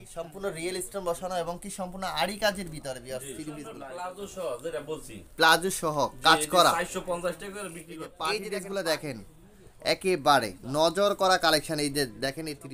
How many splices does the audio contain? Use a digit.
2